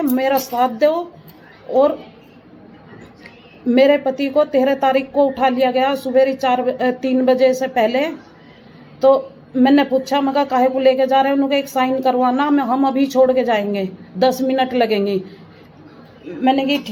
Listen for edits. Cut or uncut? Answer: uncut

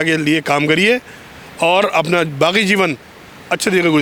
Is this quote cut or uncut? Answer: uncut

